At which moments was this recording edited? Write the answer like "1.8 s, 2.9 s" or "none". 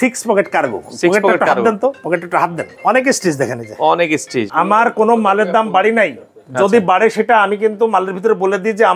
2.7 s, 4.5 s